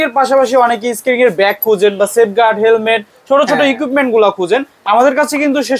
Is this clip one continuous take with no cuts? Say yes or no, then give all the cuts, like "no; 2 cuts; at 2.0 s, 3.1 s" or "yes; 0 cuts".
yes; 0 cuts